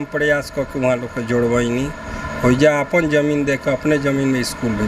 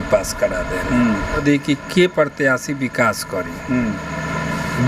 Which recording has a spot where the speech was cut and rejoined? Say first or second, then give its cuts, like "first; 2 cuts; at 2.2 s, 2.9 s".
second; 1 cut; at 1.4 s